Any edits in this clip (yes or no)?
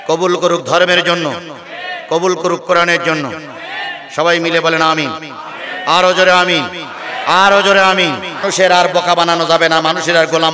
yes